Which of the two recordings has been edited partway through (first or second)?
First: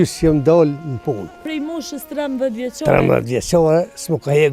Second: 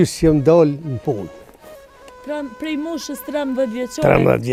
first